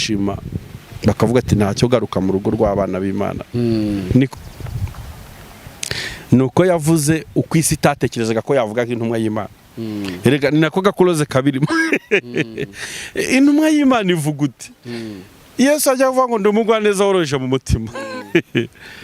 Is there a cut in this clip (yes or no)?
yes